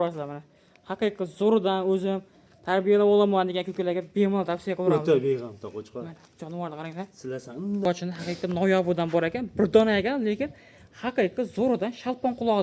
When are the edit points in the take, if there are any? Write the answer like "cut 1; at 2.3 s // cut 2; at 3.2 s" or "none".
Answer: cut 1; at 7.9 s

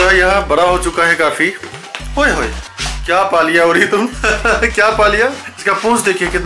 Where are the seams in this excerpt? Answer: cut 1; at 4.2 s // cut 2; at 5.5 s

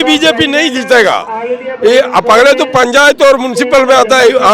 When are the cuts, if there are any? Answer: none

